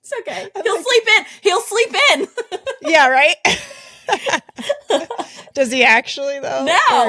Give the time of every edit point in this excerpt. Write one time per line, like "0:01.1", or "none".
none